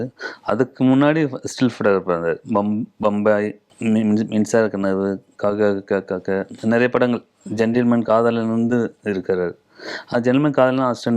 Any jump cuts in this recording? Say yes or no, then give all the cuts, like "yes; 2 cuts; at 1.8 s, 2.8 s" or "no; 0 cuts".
yes; 1 cut; at 3.6 s